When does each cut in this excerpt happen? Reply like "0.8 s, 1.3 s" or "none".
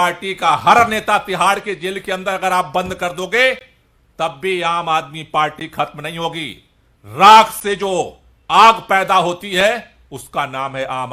none